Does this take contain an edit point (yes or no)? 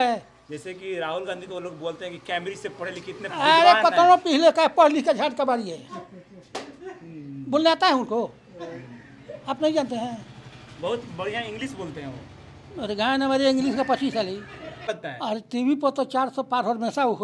yes